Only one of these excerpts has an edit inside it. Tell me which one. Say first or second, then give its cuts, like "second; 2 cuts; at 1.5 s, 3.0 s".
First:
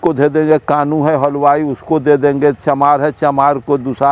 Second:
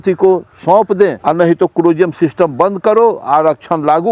second; 1 cut; at 1.2 s